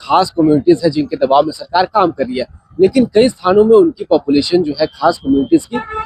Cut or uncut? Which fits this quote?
uncut